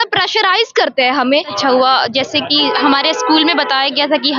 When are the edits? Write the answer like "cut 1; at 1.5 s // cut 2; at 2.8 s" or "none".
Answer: cut 1; at 1.5 s